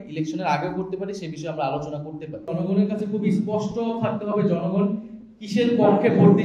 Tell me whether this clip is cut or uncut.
cut